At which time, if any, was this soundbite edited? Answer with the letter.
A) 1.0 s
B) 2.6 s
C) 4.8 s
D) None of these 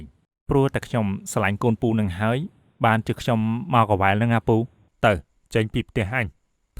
C